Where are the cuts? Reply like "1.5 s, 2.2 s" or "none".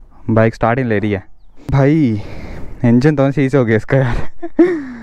1.7 s